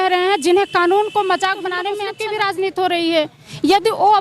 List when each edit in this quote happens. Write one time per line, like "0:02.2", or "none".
0:02.0